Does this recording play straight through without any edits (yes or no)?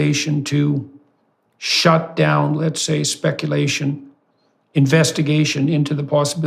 yes